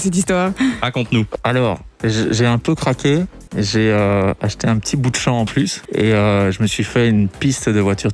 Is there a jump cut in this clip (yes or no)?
yes